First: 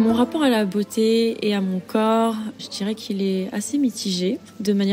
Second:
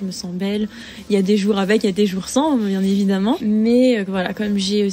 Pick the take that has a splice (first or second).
second